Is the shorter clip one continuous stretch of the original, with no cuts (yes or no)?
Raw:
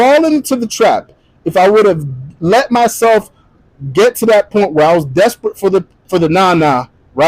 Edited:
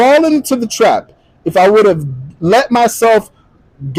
yes